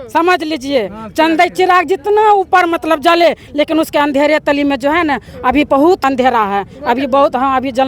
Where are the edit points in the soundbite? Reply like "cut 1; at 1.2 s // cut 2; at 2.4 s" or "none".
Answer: cut 1; at 6.0 s

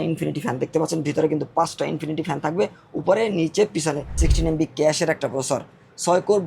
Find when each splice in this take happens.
cut 1; at 4.0 s

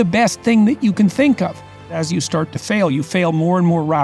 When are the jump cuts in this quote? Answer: cut 1; at 1.8 s

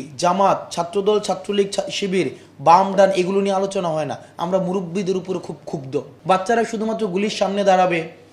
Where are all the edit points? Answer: cut 1; at 6.1 s

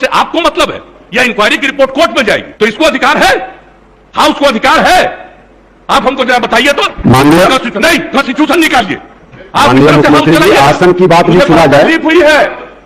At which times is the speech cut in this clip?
cut 1; at 2.5 s

